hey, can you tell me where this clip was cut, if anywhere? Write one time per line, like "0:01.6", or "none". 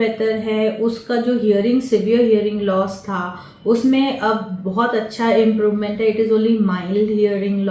none